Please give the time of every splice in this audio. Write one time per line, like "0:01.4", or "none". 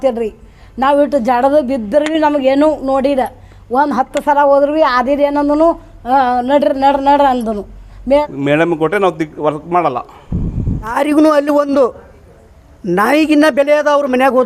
0:08.2
0:10.8